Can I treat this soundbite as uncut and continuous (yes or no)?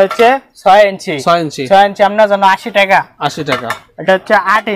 yes